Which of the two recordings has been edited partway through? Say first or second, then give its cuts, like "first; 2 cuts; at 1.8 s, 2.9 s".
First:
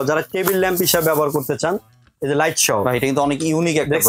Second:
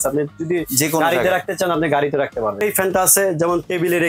second; 1 cut; at 2.6 s